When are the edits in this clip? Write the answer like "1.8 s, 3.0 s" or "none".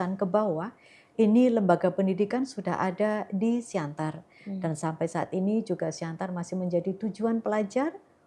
none